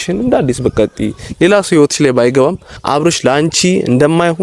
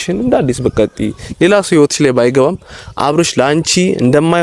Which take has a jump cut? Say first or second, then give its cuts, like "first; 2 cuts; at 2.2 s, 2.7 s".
first; 1 cut; at 2.7 s